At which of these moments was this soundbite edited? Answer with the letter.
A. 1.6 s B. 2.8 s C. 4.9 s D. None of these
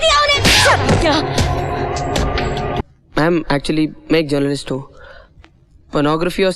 B